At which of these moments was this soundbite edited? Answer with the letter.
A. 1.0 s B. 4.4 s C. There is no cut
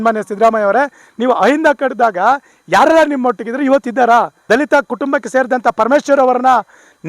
B